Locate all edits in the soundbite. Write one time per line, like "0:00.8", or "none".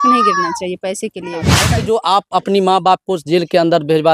0:01.6

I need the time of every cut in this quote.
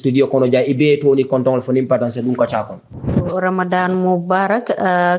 0:02.9

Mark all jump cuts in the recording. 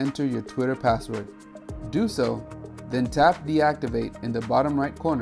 none

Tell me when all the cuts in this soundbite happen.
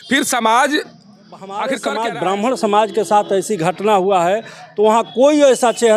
0:01.7

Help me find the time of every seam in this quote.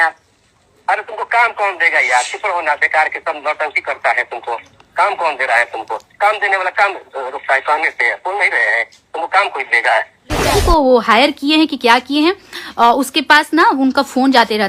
0:10.5

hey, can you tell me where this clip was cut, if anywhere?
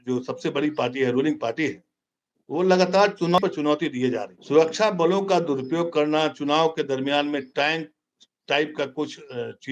0:04.3

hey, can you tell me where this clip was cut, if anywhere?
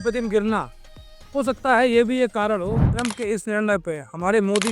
0:02.9

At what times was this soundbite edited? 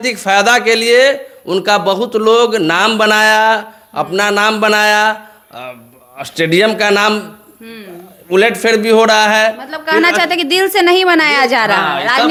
none

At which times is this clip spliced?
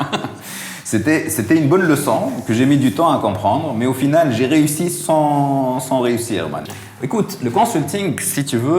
0:06.7

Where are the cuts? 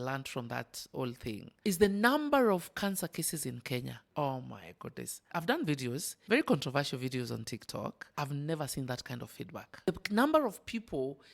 0:01.5
0:04.0
0:05.3
0:06.1
0:08.1
0:09.9

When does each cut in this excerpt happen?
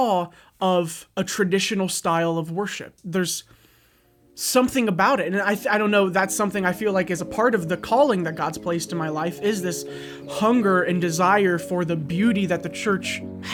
none

